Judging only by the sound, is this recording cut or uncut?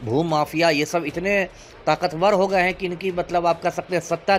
uncut